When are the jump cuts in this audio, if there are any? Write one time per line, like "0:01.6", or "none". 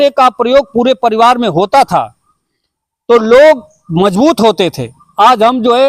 none